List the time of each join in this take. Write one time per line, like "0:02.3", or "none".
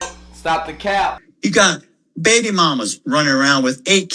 0:01.3